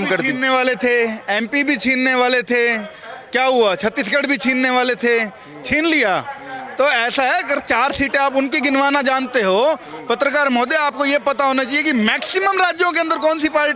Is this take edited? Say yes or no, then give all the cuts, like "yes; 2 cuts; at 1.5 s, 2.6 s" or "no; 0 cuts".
no; 0 cuts